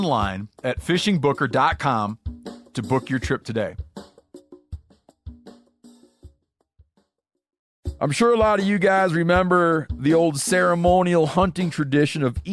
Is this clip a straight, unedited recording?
no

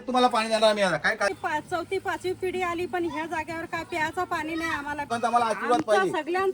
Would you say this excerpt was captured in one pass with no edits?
no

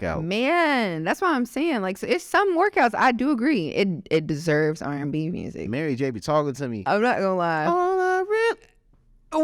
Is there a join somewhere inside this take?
yes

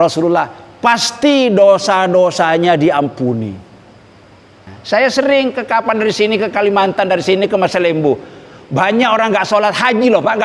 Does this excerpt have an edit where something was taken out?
yes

